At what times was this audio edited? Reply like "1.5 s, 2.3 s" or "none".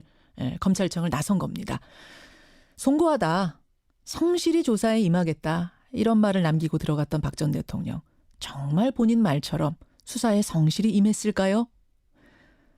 8.7 s

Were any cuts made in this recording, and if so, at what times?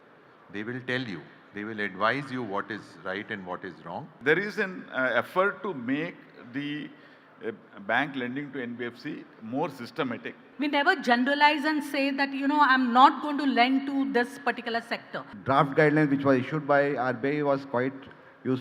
4.1 s, 10.4 s, 15.3 s

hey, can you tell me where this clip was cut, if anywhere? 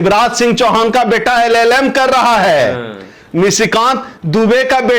none

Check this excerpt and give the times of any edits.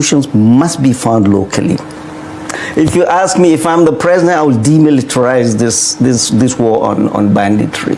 2.6 s

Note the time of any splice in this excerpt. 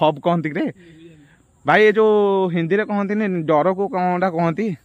none

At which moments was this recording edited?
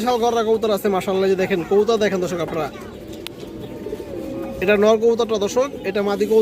none

